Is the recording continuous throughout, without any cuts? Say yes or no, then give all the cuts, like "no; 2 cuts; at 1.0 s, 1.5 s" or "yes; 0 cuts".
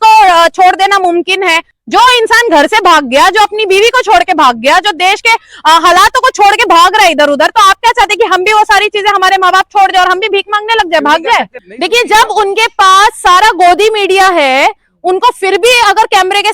no; 2 cuts; at 1.7 s, 11.6 s